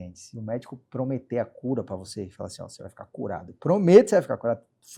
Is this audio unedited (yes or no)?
yes